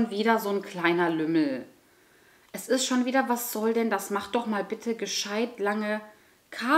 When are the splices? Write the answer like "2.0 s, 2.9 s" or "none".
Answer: none